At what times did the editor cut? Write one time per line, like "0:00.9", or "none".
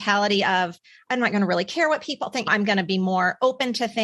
0:02.5